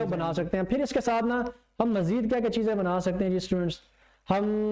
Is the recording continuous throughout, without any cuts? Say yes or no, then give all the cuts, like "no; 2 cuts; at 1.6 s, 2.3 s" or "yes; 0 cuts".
yes; 0 cuts